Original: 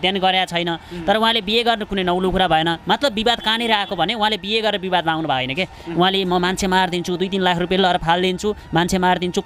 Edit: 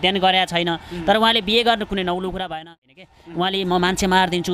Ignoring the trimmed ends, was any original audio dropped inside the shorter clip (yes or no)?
yes